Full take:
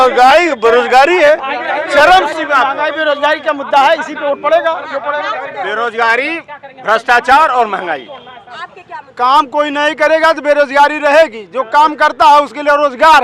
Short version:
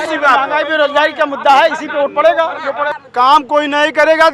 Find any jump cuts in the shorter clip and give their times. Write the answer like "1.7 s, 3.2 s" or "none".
3.0 s